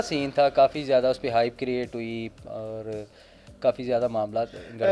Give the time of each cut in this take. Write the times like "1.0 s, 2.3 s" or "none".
none